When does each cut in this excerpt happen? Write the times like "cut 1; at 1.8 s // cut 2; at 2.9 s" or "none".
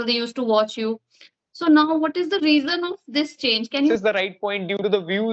cut 1; at 3.9 s